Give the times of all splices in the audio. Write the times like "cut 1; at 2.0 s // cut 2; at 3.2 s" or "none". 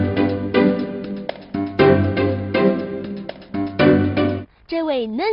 cut 1; at 2.1 s